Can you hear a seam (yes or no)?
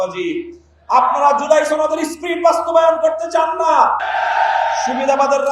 yes